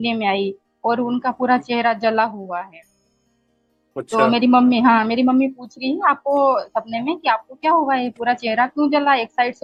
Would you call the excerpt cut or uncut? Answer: uncut